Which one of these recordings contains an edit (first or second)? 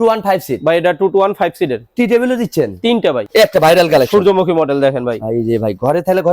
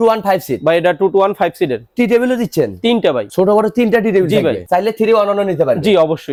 first